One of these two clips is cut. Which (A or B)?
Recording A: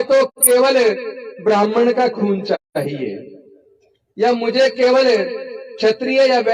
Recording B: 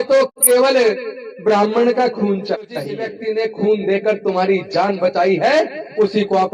B